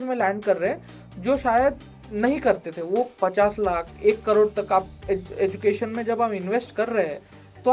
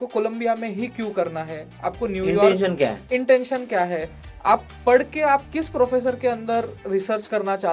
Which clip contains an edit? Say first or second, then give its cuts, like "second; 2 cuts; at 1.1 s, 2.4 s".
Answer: first; 1 cut; at 3.1 s